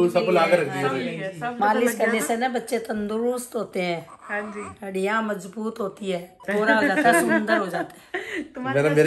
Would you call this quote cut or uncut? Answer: cut